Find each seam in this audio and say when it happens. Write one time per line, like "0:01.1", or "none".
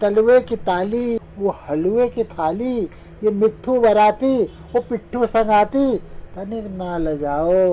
0:01.2

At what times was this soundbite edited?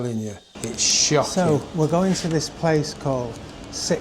0:01.3

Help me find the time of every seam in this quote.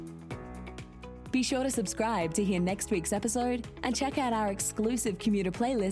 0:01.2

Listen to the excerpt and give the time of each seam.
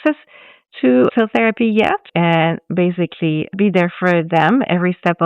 0:02.1

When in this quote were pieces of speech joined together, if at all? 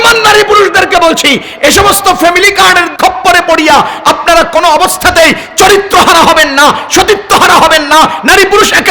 0:02.9

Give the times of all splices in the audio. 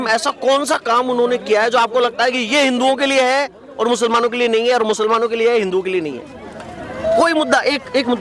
none

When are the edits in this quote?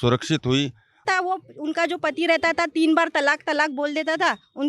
0:01.0

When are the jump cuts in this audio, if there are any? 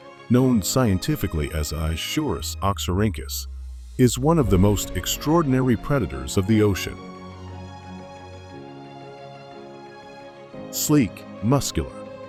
none

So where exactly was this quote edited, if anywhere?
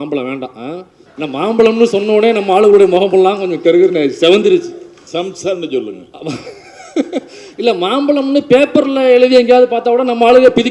0:01.0

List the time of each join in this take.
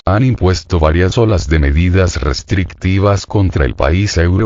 0:01.3

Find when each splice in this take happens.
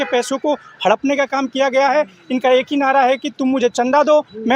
none

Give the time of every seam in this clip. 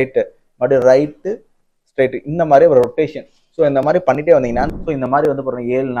0:04.7

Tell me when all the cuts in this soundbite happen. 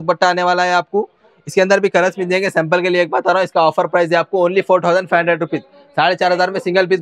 none

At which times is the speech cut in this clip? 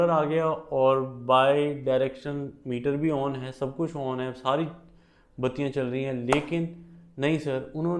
none

